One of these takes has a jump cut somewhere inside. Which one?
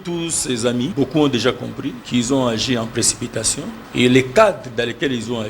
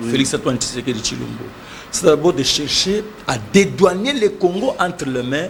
first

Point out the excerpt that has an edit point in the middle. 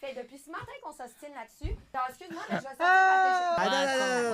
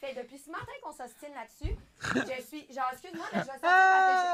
first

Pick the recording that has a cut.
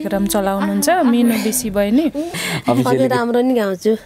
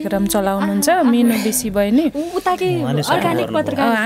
first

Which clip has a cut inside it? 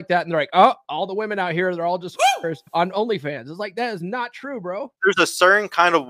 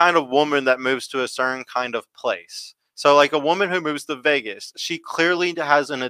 first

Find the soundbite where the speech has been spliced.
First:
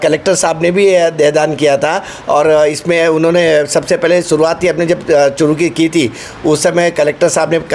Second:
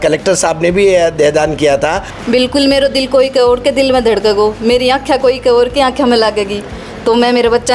second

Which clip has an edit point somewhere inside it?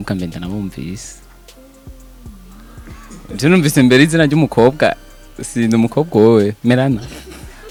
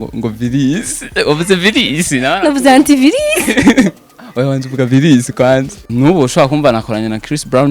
second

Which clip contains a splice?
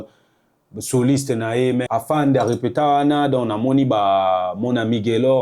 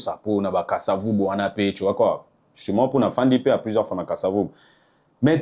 first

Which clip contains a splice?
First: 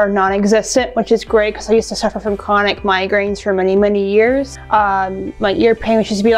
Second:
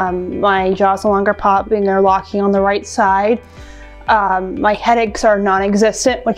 first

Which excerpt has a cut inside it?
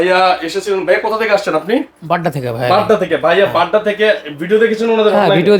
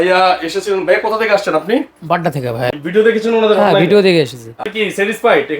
second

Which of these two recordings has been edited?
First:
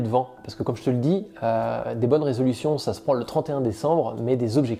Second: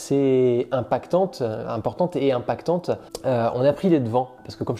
second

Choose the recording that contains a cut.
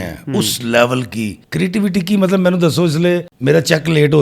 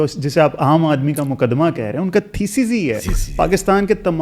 first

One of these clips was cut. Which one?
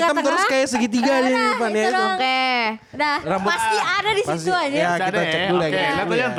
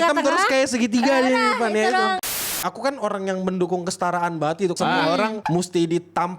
second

